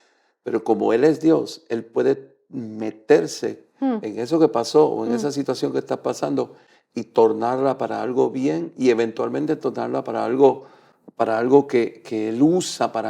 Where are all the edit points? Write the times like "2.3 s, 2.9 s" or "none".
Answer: none